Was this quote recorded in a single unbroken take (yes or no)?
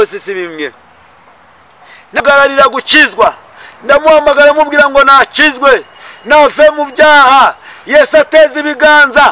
no